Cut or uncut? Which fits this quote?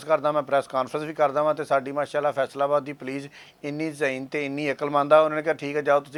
uncut